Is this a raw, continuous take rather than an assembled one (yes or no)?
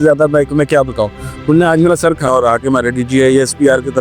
no